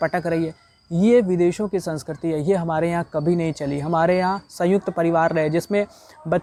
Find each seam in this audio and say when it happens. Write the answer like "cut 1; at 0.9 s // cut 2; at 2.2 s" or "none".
none